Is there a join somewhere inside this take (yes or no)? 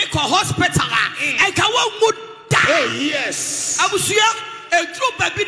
no